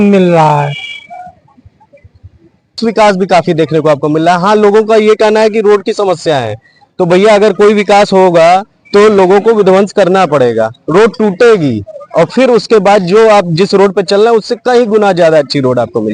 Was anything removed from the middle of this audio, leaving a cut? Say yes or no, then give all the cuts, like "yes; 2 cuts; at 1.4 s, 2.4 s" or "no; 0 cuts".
yes; 1 cut; at 2.8 s